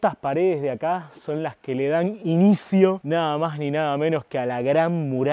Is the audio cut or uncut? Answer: uncut